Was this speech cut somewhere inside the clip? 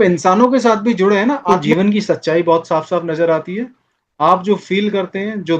yes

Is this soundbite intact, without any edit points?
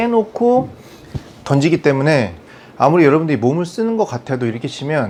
yes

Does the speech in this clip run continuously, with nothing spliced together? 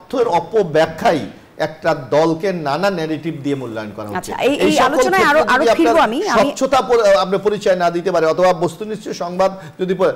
yes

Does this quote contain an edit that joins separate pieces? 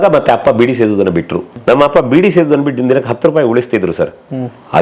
yes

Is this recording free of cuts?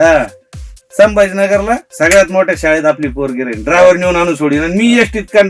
yes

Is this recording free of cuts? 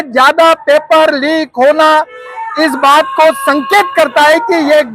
yes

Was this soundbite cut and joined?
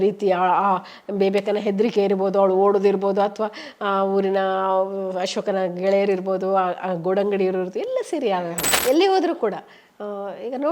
yes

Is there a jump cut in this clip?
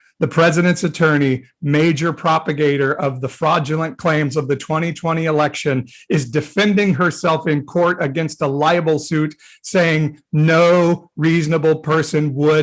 no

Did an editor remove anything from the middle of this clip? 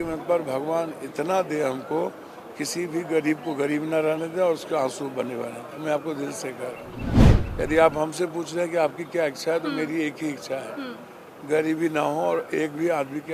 no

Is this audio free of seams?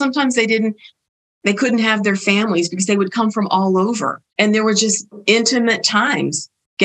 no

